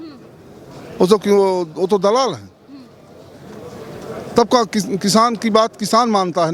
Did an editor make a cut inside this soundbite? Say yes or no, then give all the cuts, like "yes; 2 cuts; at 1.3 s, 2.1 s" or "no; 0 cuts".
no; 0 cuts